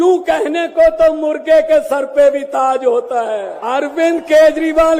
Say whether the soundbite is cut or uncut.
cut